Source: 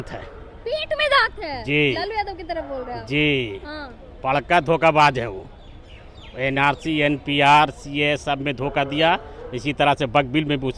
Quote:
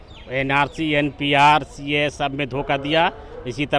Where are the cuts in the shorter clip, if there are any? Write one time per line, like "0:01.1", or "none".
none